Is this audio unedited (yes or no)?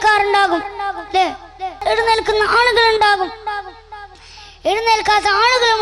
no